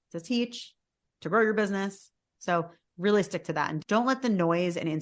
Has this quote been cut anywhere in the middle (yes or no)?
yes